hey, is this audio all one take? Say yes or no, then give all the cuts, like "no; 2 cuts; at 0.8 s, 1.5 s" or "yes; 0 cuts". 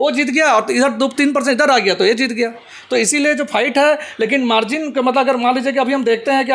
yes; 0 cuts